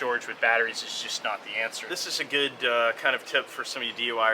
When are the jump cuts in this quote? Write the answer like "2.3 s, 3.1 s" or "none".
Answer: 1.9 s